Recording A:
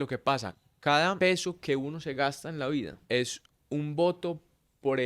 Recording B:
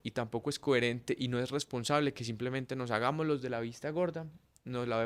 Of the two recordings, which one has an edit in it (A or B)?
A